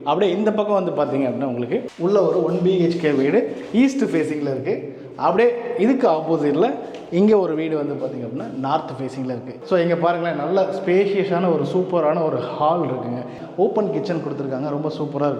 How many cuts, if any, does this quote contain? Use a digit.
2